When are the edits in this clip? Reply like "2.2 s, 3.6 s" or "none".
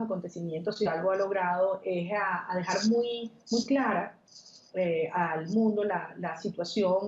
2.5 s